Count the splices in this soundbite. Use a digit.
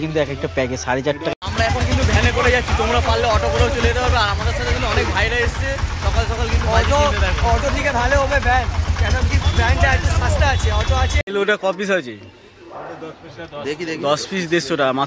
2